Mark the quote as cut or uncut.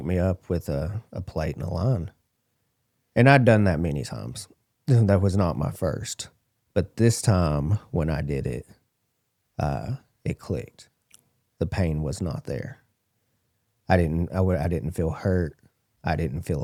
uncut